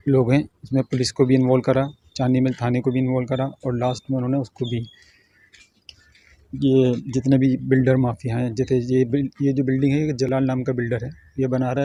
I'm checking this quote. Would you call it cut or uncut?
uncut